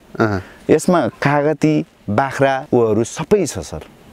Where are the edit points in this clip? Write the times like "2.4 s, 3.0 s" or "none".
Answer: 2.6 s